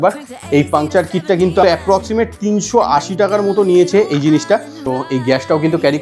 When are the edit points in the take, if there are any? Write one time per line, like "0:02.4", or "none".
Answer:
0:01.6
0:04.8